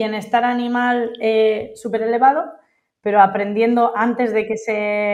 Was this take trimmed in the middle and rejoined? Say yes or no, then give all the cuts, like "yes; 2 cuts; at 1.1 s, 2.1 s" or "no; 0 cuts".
no; 0 cuts